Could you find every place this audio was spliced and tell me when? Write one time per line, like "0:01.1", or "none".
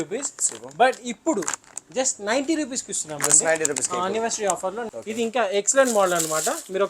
0:04.9